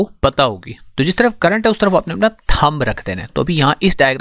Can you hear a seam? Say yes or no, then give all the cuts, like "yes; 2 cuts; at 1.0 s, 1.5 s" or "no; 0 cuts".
no; 0 cuts